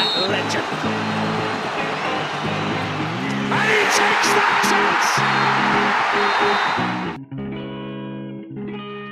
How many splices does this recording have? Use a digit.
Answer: 1